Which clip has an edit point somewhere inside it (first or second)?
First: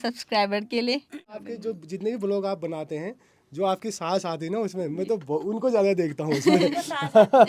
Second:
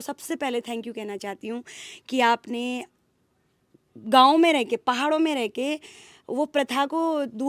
first